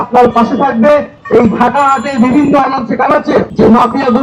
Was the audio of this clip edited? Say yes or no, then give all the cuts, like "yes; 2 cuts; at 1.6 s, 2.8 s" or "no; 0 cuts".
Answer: no; 0 cuts